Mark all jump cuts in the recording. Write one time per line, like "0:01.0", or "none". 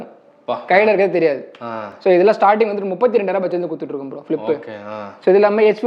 none

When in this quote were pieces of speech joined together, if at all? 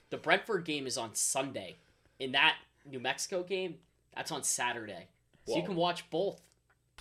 none

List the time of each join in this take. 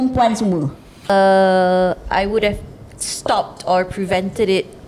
0:01.1

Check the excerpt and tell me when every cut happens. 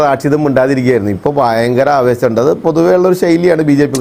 none

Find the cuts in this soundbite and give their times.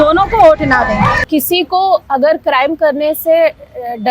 0:01.2

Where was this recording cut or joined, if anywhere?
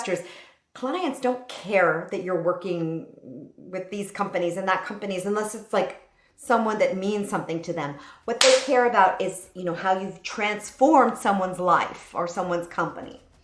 none

